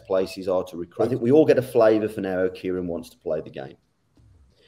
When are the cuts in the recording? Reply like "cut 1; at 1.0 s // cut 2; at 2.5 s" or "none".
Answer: cut 1; at 1.0 s